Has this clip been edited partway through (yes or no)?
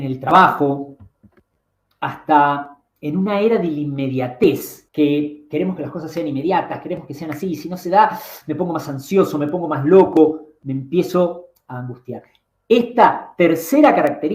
yes